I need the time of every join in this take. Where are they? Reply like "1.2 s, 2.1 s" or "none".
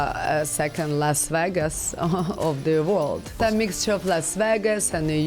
3.4 s